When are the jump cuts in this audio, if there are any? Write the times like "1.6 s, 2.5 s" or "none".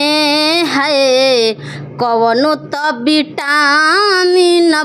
none